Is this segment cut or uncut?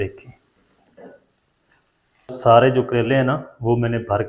cut